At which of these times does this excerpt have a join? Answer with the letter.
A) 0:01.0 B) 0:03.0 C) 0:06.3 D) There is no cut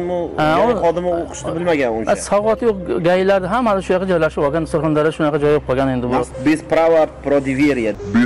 C